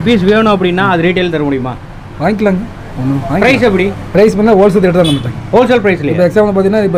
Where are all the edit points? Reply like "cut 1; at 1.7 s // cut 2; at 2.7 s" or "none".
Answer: none